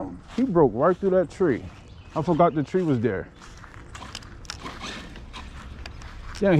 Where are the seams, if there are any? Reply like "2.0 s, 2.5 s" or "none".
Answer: none